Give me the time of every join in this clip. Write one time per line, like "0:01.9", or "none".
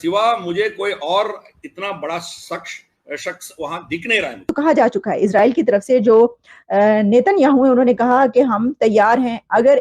0:04.5